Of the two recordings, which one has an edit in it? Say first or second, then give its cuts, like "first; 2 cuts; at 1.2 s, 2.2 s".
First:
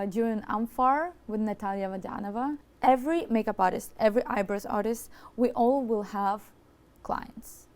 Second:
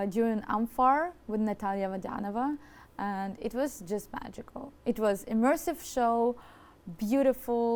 first; 1 cut; at 2.7 s